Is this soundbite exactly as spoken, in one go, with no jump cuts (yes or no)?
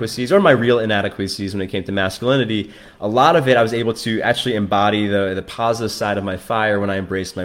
yes